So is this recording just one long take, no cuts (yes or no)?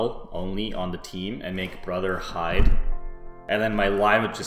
no